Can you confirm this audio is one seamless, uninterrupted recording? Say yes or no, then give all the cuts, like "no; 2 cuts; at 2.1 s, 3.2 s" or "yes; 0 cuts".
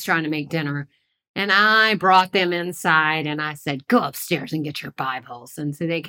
yes; 0 cuts